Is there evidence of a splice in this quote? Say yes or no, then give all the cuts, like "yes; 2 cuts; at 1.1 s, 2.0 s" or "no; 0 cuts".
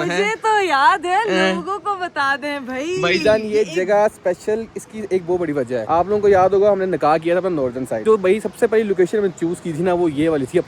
no; 0 cuts